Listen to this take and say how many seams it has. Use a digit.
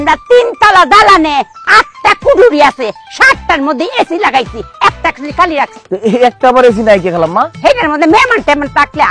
0